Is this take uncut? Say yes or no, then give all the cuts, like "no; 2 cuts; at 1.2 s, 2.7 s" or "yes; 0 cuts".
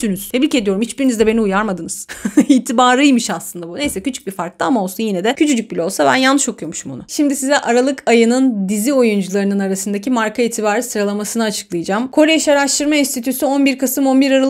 yes; 0 cuts